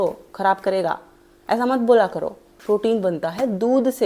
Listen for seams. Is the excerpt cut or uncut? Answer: cut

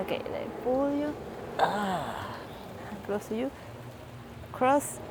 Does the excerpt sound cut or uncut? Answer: uncut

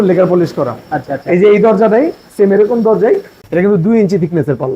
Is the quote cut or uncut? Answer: cut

